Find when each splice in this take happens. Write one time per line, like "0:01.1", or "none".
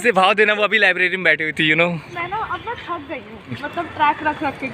0:02.1
0:03.7